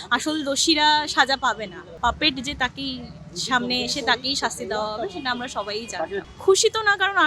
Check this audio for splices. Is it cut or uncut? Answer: cut